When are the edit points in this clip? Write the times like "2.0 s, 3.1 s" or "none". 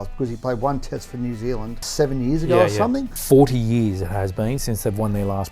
1.8 s, 3.1 s